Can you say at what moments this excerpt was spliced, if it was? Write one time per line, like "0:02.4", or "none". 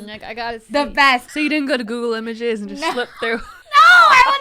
0:01.3
0:03.6